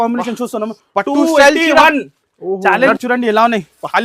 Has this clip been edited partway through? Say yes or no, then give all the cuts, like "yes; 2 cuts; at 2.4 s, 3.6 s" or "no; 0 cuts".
yes; 1 cut; at 2.9 s